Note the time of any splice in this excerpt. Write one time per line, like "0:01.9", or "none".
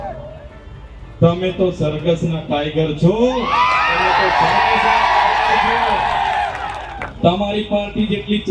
none